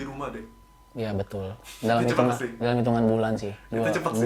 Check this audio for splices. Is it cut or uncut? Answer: uncut